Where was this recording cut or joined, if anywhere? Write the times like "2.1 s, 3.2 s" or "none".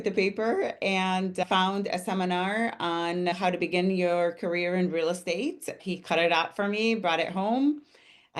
1.4 s, 3.3 s

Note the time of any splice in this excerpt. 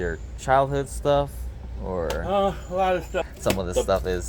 3.3 s

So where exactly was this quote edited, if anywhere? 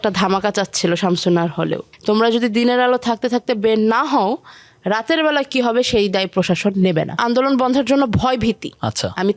1.9 s, 7.2 s

